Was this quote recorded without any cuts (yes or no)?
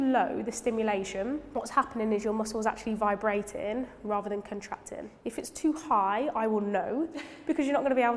no